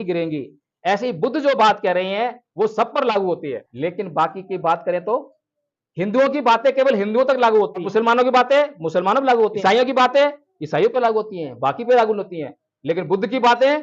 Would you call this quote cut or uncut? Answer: cut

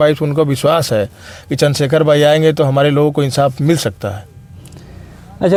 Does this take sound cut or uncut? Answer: uncut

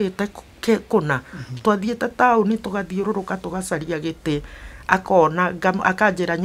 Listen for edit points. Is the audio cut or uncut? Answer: uncut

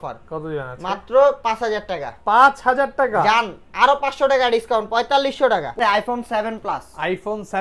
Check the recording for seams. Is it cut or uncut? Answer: cut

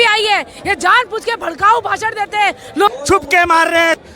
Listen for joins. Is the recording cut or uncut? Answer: cut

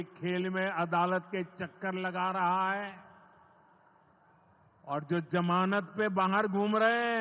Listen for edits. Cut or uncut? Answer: uncut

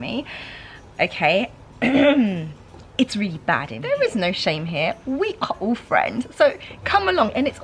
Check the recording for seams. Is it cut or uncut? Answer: cut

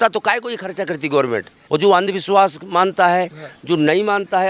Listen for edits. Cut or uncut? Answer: cut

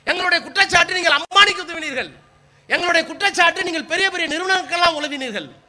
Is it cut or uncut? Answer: uncut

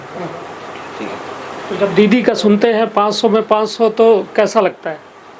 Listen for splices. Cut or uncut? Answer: uncut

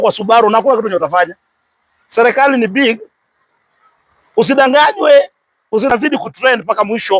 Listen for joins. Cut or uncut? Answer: cut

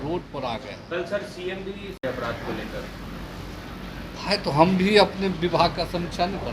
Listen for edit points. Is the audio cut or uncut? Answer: uncut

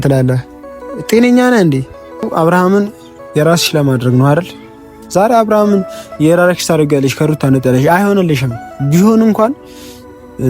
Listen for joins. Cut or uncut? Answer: cut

